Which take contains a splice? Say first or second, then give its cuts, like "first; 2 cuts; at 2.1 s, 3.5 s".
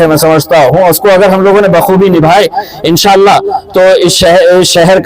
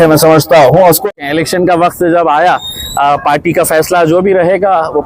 second; 1 cut; at 1.0 s